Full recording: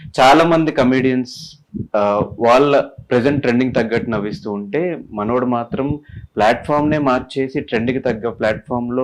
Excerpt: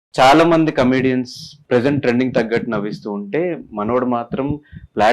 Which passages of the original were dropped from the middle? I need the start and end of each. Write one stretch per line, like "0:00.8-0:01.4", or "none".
0:01.6-0:03.0